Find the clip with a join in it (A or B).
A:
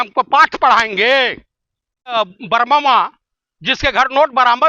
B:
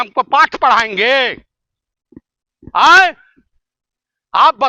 A